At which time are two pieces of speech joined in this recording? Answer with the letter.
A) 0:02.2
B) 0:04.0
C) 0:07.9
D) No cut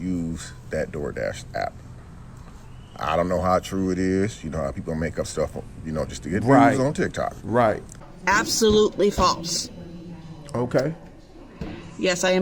C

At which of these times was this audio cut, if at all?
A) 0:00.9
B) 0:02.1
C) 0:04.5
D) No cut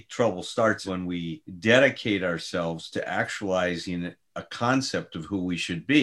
A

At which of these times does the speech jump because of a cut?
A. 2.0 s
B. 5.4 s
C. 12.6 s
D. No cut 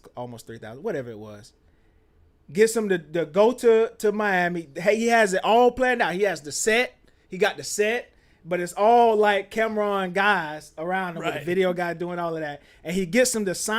D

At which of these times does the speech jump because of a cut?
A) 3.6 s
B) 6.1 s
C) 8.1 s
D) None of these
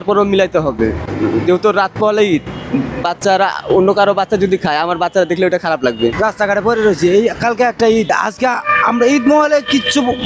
B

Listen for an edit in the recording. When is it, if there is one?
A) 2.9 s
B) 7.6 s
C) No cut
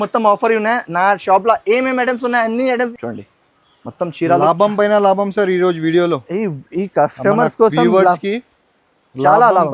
A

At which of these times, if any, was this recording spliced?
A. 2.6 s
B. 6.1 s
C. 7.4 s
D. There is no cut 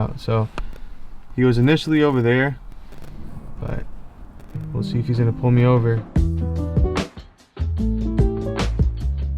B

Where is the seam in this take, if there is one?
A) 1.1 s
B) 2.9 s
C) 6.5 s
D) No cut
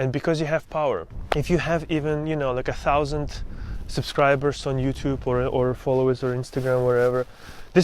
A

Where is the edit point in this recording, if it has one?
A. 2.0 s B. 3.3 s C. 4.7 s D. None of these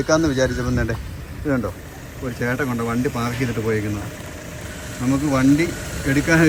D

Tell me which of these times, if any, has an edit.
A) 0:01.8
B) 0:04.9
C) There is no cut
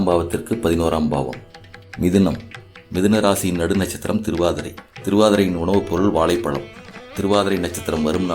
A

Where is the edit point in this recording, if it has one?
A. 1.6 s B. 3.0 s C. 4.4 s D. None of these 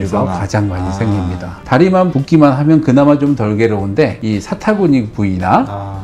A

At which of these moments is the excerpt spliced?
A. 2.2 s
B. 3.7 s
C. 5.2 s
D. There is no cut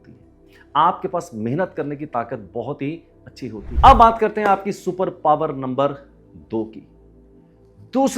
B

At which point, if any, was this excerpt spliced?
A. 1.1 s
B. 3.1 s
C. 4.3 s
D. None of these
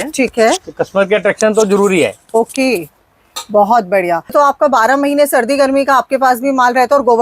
C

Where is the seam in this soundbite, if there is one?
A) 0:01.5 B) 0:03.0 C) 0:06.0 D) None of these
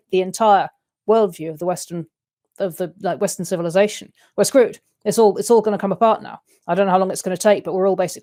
D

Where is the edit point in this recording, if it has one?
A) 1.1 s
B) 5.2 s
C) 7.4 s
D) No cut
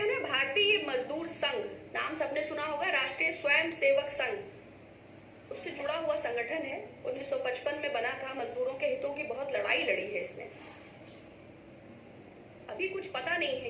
D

